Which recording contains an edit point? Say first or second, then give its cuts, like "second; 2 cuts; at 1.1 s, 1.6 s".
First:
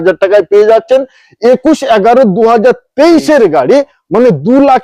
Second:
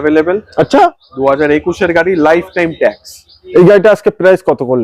second; 1 cut; at 3.3 s